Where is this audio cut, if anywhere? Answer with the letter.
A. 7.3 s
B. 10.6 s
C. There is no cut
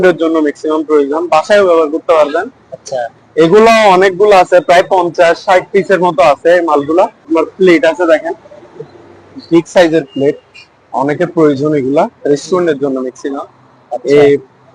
A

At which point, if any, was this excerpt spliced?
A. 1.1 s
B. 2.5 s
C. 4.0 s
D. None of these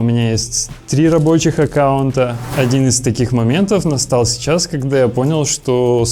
B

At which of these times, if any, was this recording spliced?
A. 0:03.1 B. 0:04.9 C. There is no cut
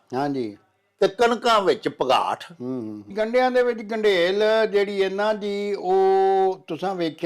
A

